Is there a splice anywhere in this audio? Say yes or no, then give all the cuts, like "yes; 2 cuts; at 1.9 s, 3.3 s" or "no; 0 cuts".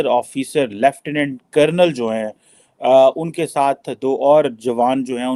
no; 0 cuts